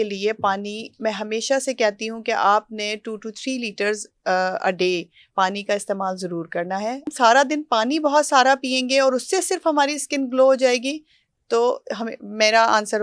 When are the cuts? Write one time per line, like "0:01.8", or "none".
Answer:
0:07.1